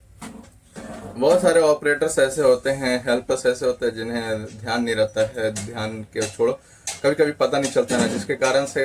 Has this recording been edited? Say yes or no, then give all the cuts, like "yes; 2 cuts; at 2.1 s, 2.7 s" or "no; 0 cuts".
no; 0 cuts